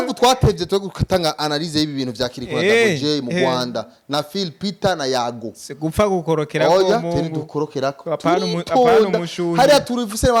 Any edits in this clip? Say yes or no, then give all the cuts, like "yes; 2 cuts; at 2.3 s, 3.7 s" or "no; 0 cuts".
no; 0 cuts